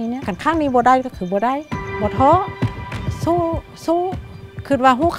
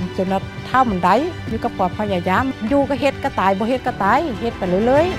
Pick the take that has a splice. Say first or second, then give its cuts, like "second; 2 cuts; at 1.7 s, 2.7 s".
first; 1 cut; at 1.9 s